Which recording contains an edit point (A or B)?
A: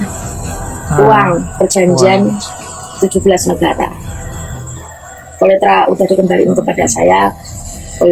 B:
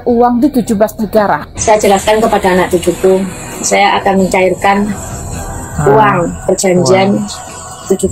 B